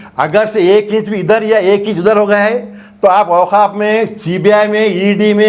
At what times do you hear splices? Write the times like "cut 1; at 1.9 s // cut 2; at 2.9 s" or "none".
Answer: none